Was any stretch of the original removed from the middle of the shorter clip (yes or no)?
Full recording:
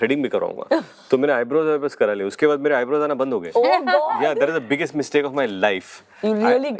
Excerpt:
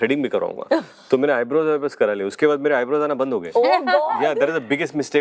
no